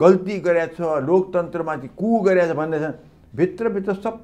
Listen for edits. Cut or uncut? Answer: uncut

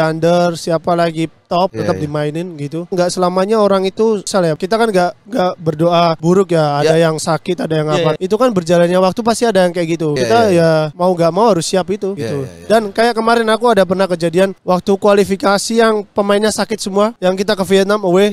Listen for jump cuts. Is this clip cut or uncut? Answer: uncut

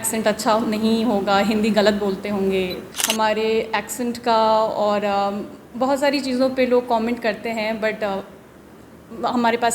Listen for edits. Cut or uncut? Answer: cut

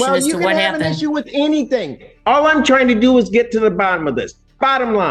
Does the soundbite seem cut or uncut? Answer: uncut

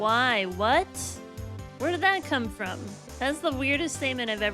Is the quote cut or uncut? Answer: cut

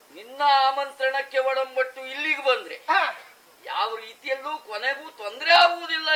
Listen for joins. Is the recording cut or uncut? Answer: uncut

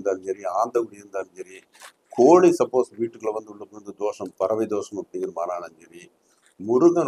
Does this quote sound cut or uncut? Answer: uncut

